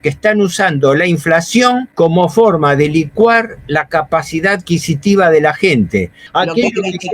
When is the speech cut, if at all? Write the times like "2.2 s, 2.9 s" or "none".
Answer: 1.9 s, 6.2 s